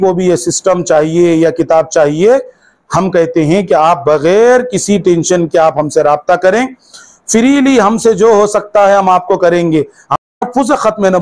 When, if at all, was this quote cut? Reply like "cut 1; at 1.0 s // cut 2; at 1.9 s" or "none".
cut 1; at 10.0 s